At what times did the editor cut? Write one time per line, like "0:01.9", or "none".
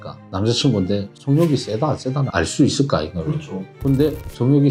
none